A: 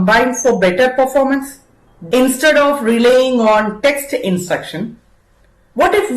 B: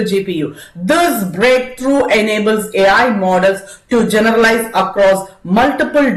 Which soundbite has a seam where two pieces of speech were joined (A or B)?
A